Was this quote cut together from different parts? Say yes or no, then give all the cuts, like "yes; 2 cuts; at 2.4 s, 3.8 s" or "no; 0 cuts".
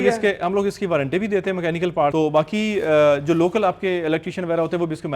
yes; 1 cut; at 2.1 s